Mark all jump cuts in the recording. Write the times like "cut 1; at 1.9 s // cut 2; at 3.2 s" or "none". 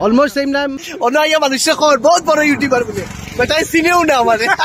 cut 1; at 1.1 s